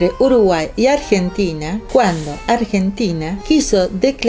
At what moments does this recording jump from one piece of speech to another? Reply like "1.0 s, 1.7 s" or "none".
1.7 s, 3.3 s